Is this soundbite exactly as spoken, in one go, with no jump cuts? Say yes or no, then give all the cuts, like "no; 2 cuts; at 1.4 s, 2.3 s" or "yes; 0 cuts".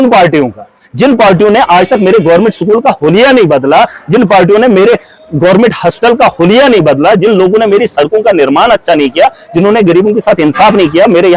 yes; 0 cuts